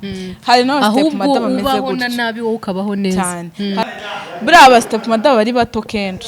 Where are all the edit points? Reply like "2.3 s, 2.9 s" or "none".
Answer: 3.8 s